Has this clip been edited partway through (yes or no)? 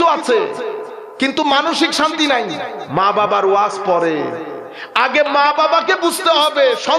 yes